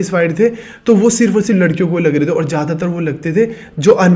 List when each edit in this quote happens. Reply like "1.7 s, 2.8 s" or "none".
none